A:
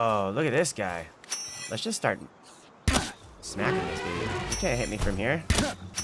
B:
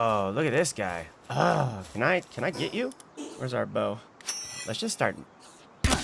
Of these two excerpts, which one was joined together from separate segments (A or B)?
A